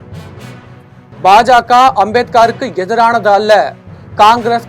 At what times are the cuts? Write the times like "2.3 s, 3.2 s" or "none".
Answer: 1.2 s